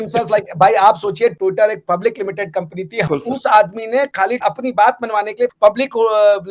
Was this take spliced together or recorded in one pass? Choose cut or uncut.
cut